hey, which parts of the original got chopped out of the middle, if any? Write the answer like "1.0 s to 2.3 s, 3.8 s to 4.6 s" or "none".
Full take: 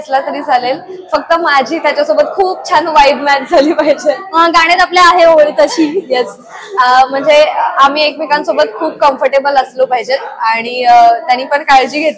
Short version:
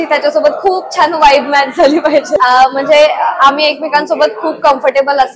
4.1 s to 6.7 s

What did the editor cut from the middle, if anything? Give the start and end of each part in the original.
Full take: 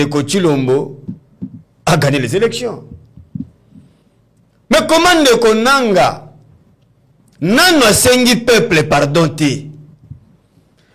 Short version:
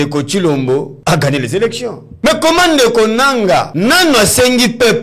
0.9 s to 1.7 s, 2.9 s to 4.5 s, 6.2 s to 7.4 s

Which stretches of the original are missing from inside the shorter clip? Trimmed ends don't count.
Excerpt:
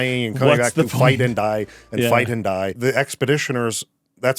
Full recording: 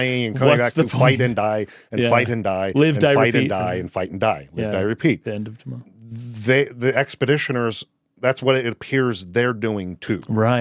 2.7 s to 6.7 s

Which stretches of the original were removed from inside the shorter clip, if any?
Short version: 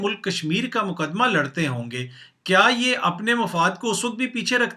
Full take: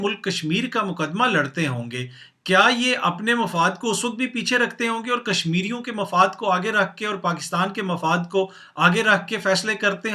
none

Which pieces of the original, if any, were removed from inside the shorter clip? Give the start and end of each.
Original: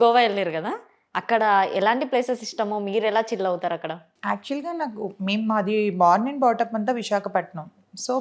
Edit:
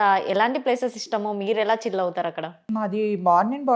4.1 s to 5.4 s

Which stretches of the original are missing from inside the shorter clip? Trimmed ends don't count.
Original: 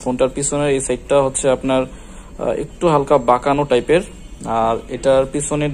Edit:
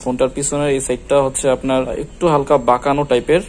2.0 s to 2.6 s

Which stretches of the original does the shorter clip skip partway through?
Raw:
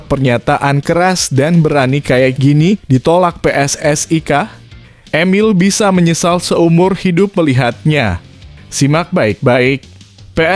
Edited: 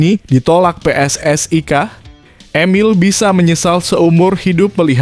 none

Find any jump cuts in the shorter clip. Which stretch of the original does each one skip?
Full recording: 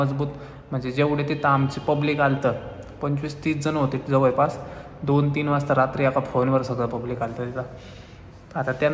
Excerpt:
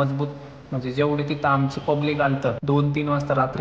2.6 s to 5.0 s

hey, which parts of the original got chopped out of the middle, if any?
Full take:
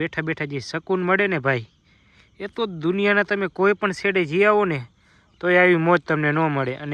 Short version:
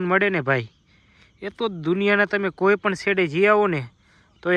none

